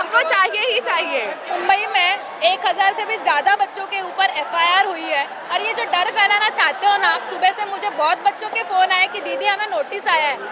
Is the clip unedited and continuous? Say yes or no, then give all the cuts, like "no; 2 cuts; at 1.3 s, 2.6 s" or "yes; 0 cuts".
no; 1 cut; at 1.5 s